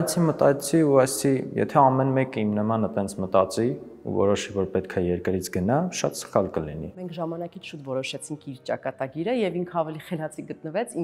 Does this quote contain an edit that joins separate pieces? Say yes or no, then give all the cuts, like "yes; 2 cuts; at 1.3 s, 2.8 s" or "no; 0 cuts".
yes; 1 cut; at 7.0 s